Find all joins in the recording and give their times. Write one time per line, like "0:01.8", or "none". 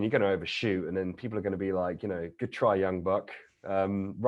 0:02.3